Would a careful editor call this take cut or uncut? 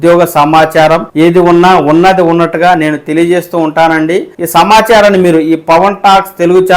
cut